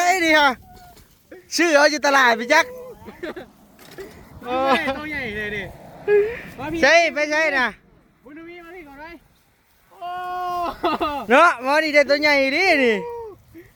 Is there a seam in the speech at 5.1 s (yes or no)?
no